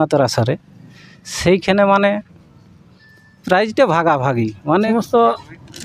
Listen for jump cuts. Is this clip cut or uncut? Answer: cut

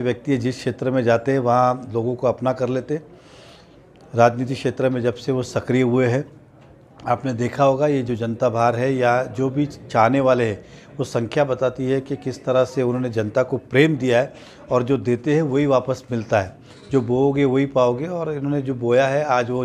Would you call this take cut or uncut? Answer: uncut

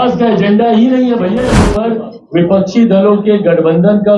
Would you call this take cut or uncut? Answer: cut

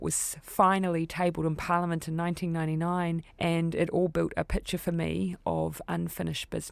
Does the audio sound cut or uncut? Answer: cut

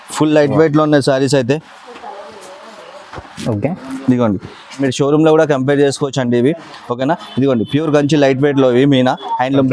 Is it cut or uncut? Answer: cut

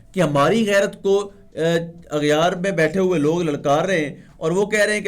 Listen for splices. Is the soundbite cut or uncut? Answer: uncut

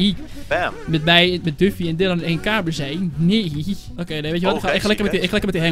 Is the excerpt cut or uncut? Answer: cut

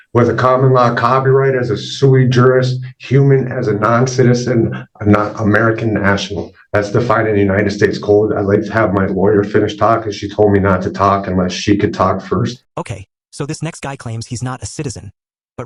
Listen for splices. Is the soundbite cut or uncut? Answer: uncut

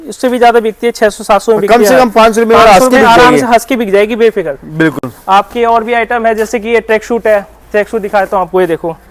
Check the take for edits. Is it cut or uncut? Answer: uncut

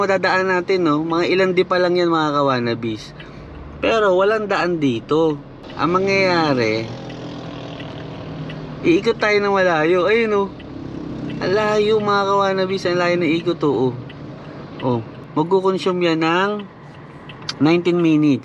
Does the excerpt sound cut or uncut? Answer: cut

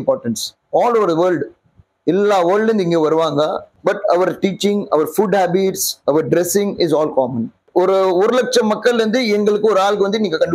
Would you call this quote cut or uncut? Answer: cut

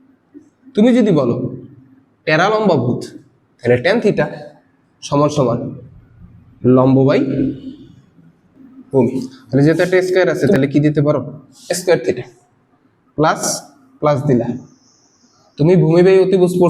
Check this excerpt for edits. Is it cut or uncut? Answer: cut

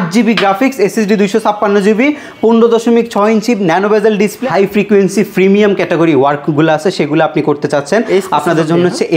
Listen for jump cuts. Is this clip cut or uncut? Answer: cut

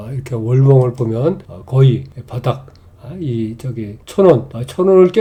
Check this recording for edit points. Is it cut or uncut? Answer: uncut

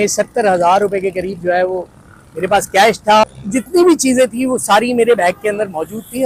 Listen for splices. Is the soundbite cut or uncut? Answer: cut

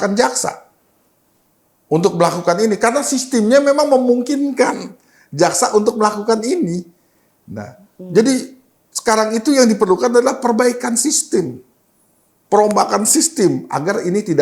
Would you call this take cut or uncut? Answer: uncut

